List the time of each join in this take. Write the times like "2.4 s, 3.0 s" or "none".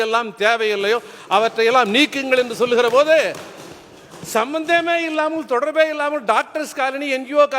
none